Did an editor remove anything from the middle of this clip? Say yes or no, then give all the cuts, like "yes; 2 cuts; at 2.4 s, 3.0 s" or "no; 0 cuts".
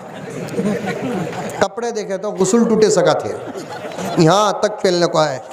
no; 0 cuts